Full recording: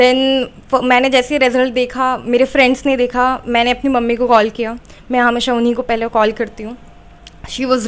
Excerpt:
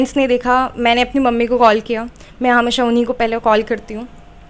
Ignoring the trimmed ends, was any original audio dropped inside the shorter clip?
no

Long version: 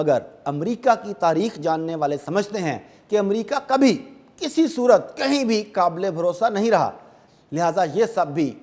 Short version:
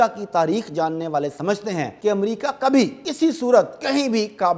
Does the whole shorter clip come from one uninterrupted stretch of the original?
no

